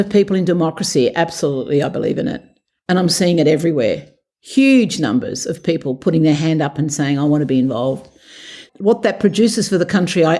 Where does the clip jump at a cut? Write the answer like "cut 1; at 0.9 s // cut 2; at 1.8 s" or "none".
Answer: cut 1; at 8.6 s